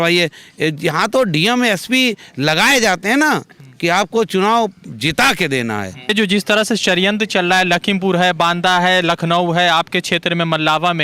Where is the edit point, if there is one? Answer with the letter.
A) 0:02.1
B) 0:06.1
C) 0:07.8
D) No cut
B